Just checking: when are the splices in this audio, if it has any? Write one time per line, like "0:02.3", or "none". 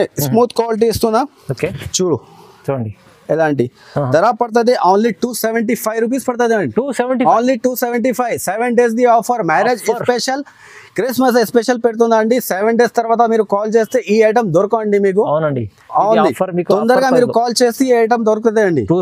none